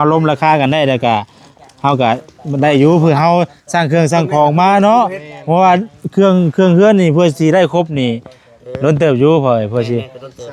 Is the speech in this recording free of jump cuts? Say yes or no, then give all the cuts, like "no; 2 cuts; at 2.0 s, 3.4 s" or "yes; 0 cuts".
yes; 0 cuts